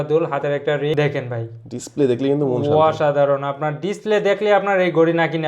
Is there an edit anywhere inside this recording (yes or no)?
yes